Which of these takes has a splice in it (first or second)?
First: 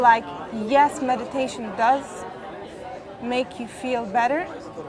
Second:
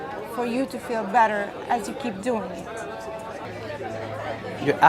second